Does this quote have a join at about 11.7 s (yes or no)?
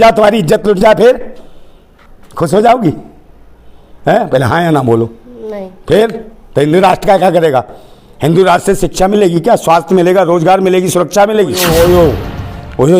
yes